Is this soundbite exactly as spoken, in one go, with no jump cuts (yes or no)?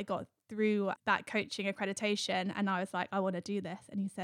no